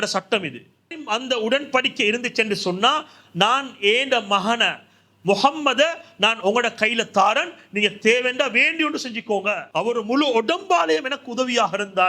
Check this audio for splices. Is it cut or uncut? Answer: cut